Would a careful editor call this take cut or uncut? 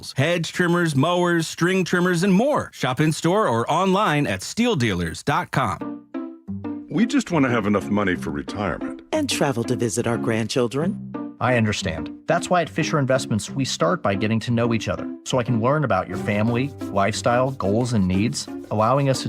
cut